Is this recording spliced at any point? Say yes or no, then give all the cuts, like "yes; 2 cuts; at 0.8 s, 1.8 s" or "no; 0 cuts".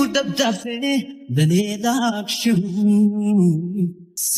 no; 0 cuts